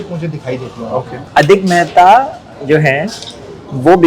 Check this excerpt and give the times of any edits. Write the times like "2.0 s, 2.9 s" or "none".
1.3 s